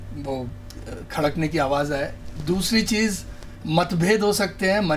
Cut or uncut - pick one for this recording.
uncut